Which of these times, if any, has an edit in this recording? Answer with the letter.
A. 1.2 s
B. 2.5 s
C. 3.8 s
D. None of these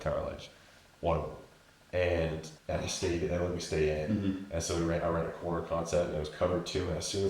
B